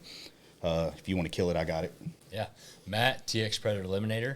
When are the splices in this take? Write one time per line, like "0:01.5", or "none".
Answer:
0:02.2